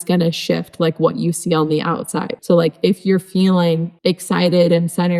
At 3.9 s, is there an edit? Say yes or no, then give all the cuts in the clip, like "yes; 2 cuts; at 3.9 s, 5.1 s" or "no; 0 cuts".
yes; 2 cuts; at 2.3 s, 3.9 s